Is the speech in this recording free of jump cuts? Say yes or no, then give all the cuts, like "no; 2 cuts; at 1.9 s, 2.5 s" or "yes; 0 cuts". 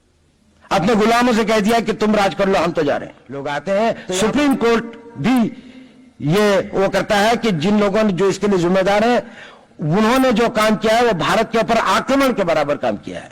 no; 1 cut; at 3.5 s